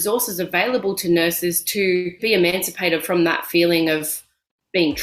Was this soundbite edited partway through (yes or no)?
yes